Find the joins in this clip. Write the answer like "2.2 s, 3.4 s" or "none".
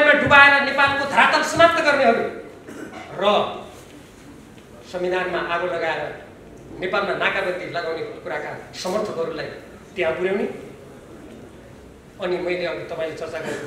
none